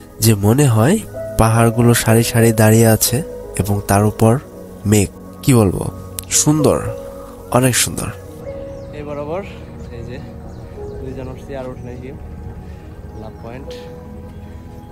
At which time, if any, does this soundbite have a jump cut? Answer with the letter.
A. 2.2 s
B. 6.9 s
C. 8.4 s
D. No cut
D